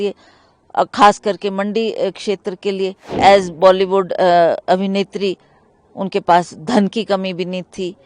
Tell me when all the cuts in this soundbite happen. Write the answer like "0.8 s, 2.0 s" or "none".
3.2 s